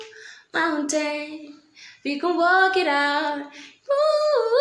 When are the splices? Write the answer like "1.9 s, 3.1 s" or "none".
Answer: none